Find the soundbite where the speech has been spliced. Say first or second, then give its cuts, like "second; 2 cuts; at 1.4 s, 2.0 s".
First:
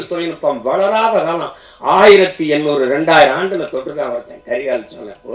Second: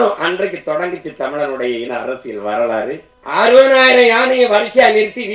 second; 1 cut; at 3.1 s